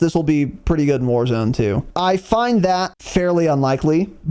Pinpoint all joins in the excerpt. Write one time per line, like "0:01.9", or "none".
0:01.9
0:03.0

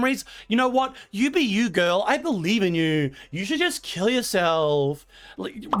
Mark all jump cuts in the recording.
none

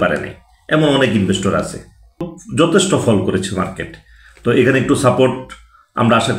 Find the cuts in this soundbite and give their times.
0:02.3

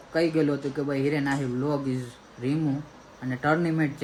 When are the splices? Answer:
none

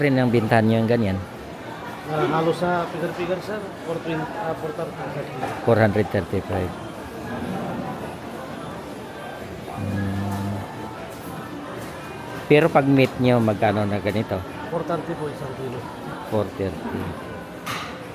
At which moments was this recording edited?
none

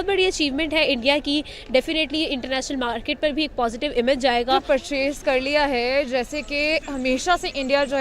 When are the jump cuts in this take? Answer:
0:04.6

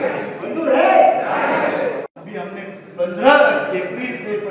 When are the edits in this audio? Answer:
0:02.0

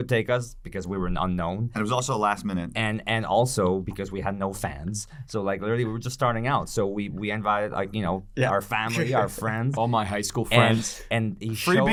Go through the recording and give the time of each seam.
none

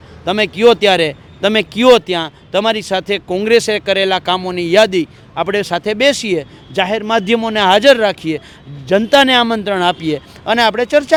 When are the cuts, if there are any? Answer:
none

